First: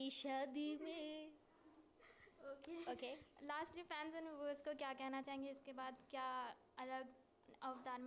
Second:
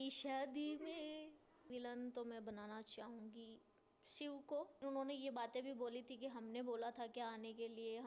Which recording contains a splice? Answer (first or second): second